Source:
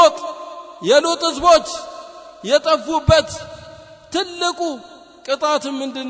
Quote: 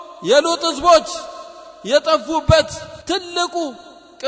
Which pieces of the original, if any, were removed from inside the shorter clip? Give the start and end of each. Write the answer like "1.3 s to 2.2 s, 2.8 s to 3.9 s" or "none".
3.4 s to 3.9 s